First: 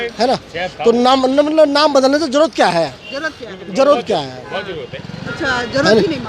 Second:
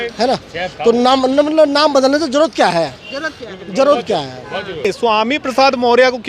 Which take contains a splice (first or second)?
second